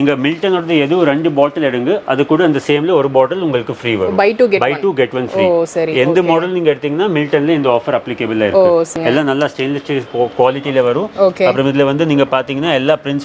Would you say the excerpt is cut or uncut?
cut